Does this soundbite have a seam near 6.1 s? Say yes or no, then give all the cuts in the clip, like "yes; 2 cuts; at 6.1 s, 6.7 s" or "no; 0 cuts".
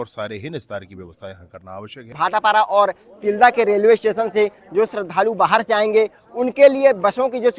no; 1 cut; at 2.2 s